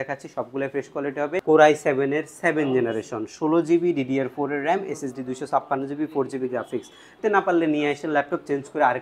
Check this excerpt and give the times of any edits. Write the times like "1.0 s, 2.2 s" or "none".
1.4 s, 7.2 s